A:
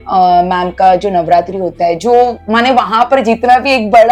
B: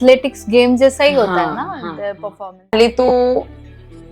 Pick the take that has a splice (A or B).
B